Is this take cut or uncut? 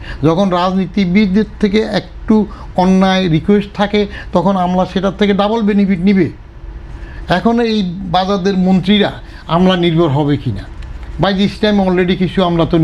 uncut